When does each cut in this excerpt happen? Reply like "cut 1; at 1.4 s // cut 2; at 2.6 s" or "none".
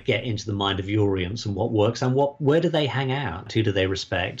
cut 1; at 3.4 s